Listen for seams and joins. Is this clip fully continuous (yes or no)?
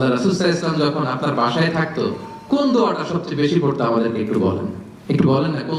yes